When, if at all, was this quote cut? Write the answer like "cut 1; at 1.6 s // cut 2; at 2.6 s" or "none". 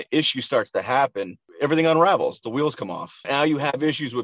cut 1; at 3.3 s